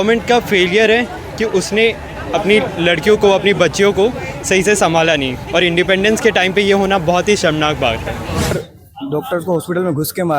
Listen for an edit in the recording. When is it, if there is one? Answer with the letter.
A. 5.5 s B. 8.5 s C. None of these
B